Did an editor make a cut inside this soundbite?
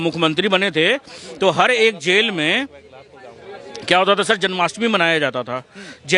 no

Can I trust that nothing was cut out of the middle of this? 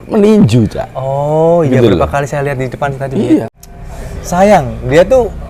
no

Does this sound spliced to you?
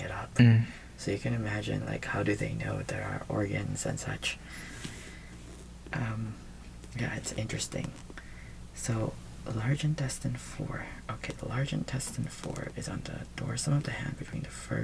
no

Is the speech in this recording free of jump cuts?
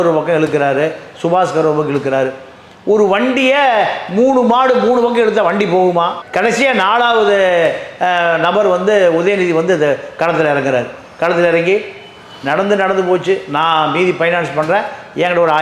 yes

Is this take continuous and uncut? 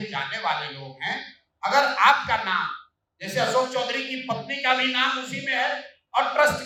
yes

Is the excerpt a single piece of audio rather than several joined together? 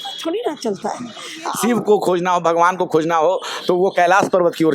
no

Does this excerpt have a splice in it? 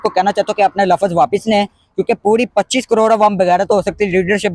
no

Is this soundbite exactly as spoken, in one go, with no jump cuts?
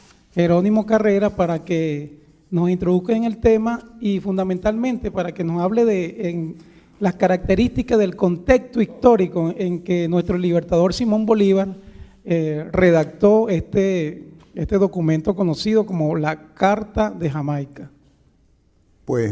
yes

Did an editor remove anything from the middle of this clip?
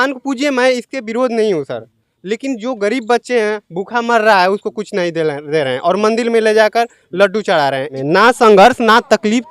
yes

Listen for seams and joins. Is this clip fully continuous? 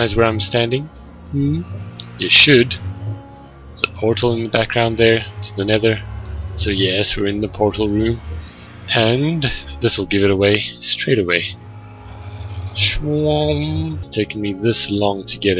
yes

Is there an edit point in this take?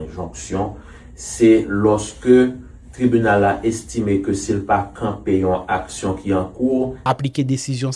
yes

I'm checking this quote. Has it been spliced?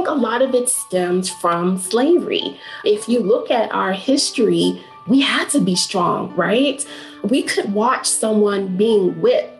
yes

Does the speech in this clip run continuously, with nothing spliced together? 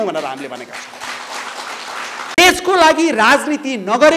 no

